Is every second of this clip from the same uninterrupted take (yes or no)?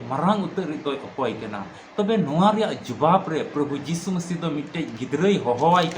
yes